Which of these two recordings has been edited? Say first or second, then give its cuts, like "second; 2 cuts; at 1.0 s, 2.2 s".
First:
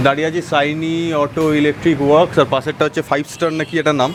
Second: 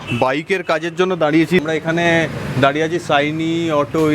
second; 1 cut; at 1.6 s